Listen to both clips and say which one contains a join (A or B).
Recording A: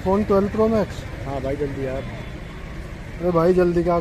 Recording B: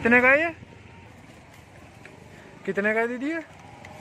B